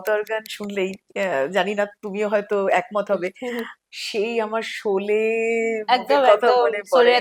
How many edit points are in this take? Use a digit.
0